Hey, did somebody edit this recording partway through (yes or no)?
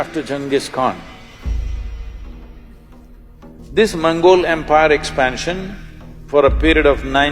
yes